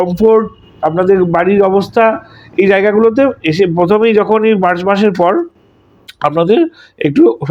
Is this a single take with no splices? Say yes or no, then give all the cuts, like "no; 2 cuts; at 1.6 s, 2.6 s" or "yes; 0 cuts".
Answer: yes; 0 cuts